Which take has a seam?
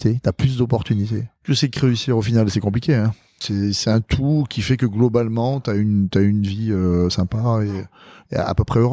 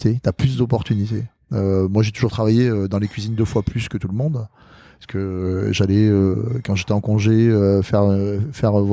first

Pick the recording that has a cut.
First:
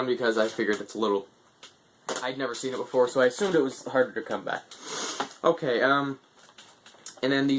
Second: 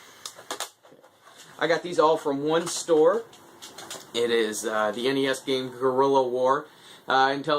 second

